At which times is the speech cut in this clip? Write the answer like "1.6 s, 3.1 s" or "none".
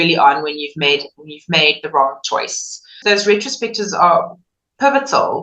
2.9 s